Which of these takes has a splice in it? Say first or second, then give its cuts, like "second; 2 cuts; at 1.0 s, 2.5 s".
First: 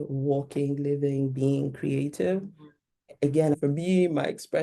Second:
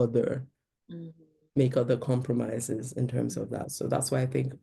first; 1 cut; at 3.5 s